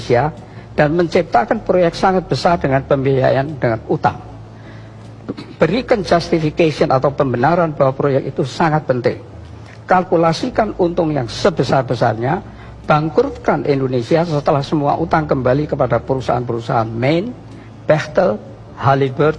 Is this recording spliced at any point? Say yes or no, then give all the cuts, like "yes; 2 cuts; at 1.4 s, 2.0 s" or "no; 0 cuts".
no; 0 cuts